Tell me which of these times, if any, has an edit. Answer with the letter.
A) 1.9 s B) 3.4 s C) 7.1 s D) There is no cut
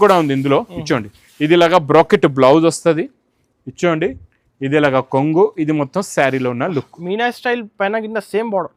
D